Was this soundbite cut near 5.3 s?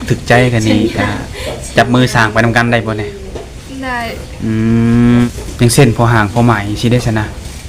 yes; 1 cut; at 5.3 s

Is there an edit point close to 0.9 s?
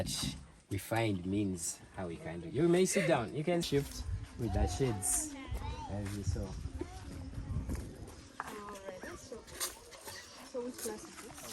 no; 1 cut; at 3.7 s

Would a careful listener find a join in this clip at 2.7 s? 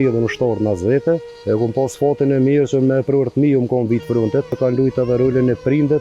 no; 2 cuts; at 1.3 s, 4.6 s

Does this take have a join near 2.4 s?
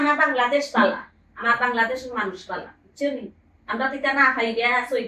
no; 0 cuts

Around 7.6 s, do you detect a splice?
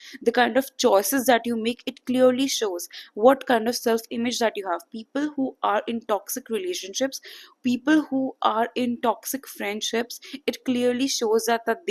no; 0 cuts

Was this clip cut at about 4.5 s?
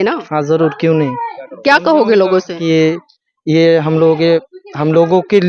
no; 1 cut; at 1.4 s

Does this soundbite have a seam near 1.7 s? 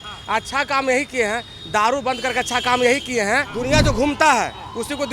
no; 1 cut; at 3.5 s

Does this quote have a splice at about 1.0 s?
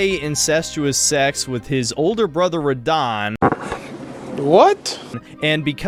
no; 0 cuts

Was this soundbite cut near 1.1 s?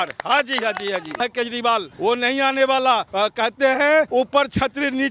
yes; 4 cuts; at 1.1 s, 1.9 s, 3.1 s, 4.1 s

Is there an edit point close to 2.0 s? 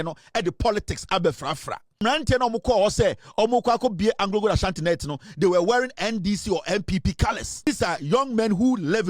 yes; 2 cuts; at 2.0 s, 7.7 s

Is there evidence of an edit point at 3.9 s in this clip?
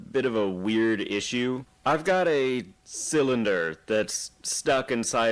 no; 1 cut; at 1.7 s

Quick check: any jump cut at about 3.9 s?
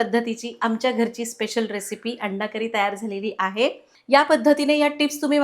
yes; 1 cut; at 3.9 s

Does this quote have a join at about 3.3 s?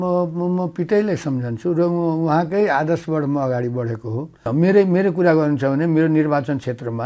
no; 1 cut; at 4.5 s

